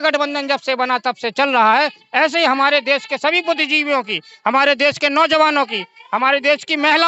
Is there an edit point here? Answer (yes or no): no